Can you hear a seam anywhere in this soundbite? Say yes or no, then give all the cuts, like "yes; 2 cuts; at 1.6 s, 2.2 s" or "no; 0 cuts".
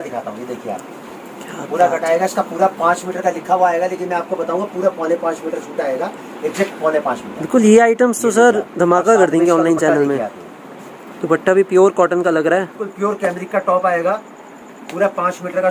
yes; 1 cut; at 12.8 s